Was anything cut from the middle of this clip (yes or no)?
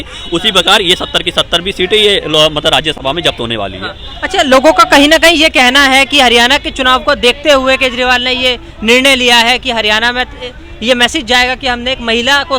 no